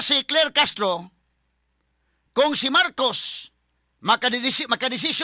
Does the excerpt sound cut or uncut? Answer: uncut